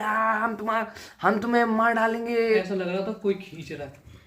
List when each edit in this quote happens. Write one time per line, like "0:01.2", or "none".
0:02.4